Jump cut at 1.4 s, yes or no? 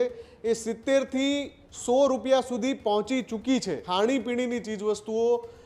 no